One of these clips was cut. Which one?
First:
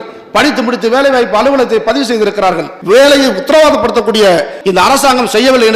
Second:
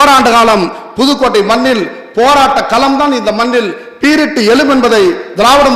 first; 2 cuts; at 2.7 s, 4.6 s

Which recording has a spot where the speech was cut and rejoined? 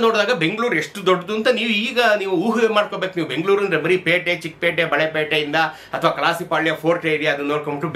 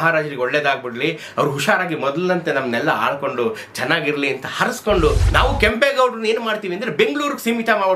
second; 1 cut; at 5.2 s

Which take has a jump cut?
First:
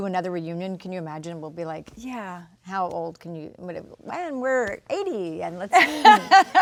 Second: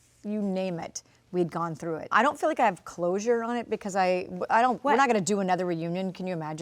second; 1 cut; at 2.1 s

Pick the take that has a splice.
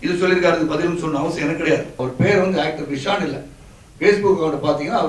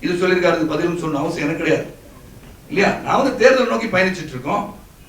first; 1 cut; at 2.0 s

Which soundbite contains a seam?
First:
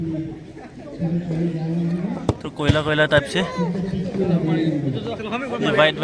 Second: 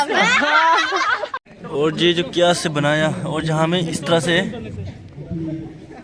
second; 1 cut; at 1.3 s

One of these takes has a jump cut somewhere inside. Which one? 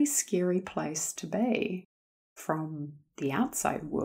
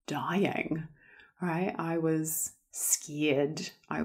first; 1 cut; at 1.8 s

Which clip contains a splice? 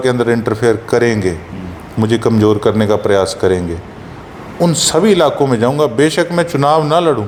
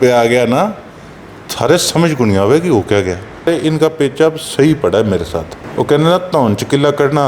second; 2 cuts; at 3.5 s, 5.6 s

